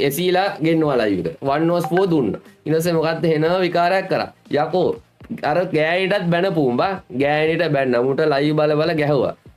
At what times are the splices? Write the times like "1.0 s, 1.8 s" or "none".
none